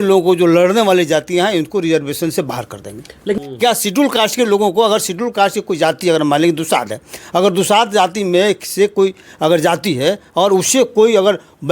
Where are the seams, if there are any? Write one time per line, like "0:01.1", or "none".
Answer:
0:03.4